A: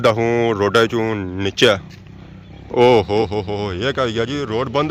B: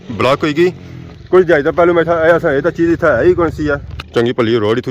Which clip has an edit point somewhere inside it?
B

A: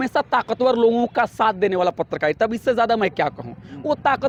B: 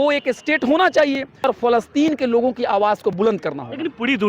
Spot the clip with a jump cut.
B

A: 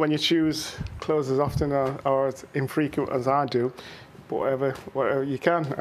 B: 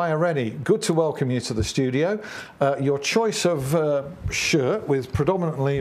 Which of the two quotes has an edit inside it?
B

